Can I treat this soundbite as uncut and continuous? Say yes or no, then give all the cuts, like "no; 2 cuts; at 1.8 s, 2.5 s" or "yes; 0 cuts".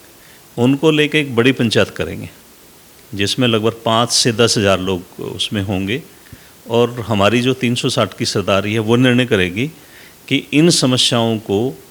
yes; 0 cuts